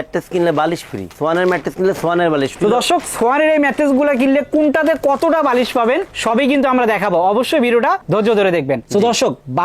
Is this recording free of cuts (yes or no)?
no